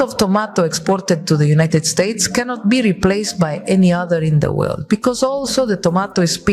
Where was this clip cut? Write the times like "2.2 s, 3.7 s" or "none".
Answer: 4.8 s